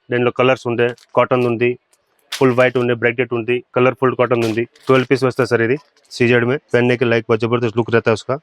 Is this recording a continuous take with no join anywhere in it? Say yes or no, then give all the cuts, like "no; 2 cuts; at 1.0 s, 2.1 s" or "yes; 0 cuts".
no; 4 cuts; at 3.7 s, 4.8 s, 6.0 s, 6.6 s